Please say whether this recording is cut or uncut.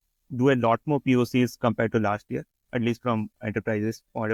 uncut